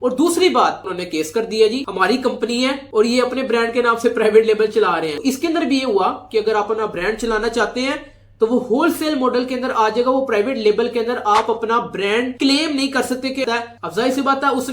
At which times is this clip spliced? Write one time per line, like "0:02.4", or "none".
0:00.9
0:05.2
0:13.4